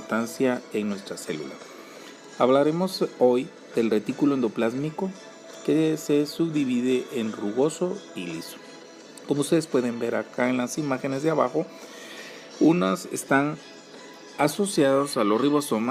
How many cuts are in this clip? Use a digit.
0